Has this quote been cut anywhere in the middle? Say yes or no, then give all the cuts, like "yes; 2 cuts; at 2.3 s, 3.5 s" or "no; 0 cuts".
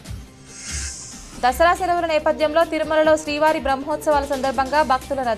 no; 0 cuts